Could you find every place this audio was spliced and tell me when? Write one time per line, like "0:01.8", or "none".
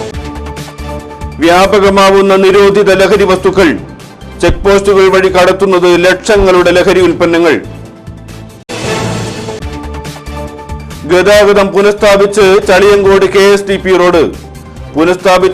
0:01.0